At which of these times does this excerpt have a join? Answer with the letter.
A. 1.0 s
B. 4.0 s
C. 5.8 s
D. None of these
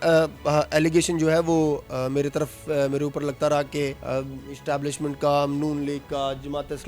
B